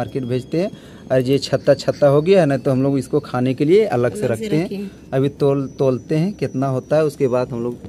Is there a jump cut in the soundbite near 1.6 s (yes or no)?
no